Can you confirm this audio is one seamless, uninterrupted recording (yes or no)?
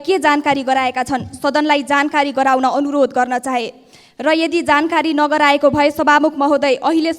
yes